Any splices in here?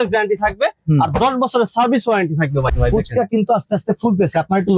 yes; 1 cut; at 2.7 s

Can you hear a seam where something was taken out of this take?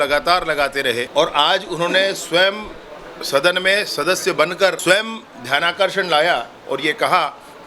yes; 2 cuts; at 1.1 s, 4.8 s

